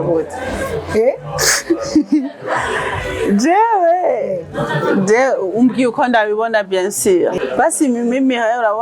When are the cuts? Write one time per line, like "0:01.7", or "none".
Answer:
0:07.4